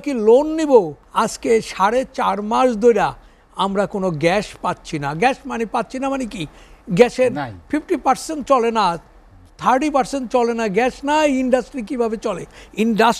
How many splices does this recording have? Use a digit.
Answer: 1